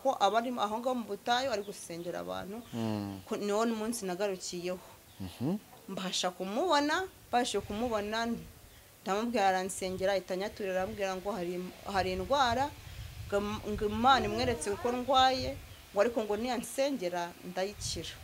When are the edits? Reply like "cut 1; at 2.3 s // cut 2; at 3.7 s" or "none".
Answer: none